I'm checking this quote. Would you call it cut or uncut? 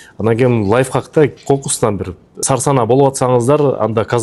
cut